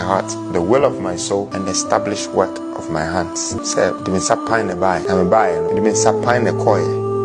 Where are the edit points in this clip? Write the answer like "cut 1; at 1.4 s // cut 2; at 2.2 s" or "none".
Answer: cut 1; at 1.5 s // cut 2; at 3.6 s // cut 3; at 5.0 s // cut 4; at 5.7 s